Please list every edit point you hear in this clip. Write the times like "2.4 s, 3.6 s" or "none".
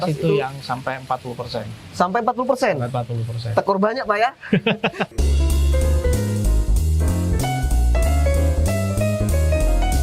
5.1 s

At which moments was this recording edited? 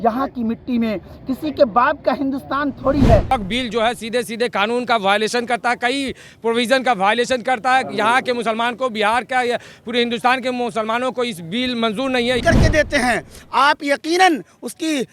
3.3 s, 12.4 s

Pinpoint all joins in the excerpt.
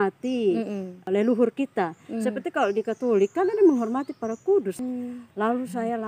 1.0 s, 4.8 s

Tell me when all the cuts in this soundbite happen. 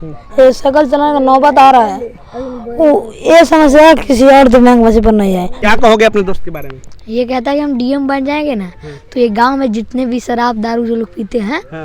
5.7 s

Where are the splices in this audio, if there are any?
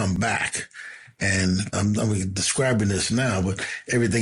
1.7 s

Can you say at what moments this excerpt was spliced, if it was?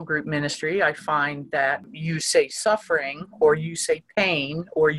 1.9 s

